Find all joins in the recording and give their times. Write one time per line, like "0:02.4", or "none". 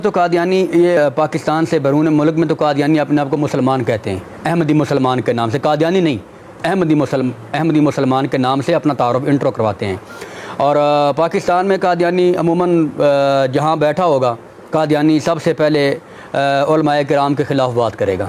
0:01.0